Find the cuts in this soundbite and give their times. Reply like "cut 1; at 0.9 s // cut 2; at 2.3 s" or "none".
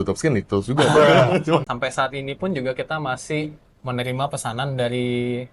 cut 1; at 1.7 s